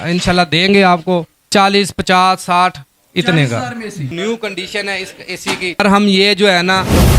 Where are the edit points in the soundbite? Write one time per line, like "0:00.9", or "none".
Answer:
0:01.5
0:04.1
0:05.7